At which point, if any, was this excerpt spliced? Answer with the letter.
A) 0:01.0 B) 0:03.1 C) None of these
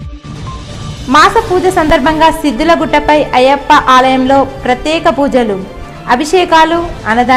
A